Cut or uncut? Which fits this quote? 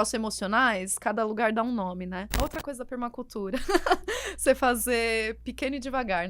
cut